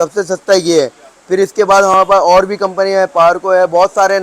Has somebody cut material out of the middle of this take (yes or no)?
no